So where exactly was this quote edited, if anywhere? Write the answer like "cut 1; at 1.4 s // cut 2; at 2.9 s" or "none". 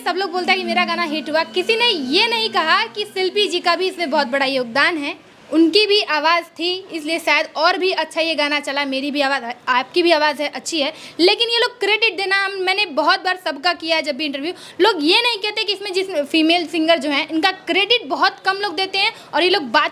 none